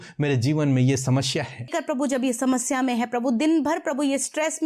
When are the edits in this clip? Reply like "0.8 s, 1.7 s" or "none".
1.7 s